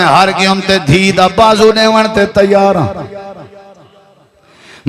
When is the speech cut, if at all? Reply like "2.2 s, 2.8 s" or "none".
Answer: none